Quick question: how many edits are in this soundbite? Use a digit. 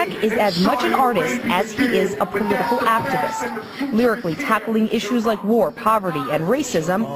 1